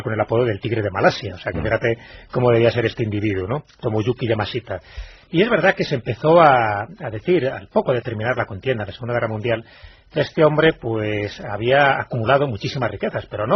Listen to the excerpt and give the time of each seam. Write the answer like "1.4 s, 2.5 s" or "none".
none